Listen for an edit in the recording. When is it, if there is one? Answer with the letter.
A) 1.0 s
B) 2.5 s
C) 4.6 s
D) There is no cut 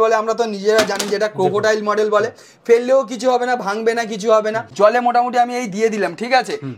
C